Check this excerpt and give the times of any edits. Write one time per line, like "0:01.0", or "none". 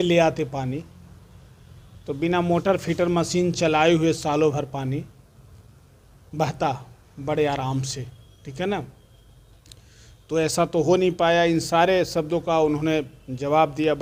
none